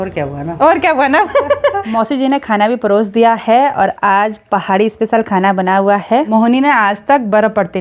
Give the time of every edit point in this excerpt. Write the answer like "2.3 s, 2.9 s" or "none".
2.0 s, 6.3 s